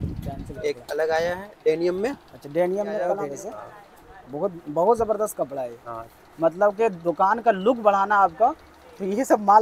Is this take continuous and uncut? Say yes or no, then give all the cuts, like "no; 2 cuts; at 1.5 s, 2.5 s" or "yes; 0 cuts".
no; 1 cut; at 3.2 s